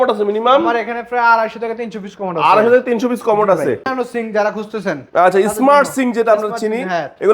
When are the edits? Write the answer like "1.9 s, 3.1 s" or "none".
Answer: 3.9 s